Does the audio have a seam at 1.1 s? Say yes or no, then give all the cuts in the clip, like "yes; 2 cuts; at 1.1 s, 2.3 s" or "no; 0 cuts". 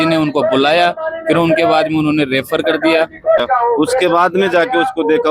no; 1 cut; at 3.4 s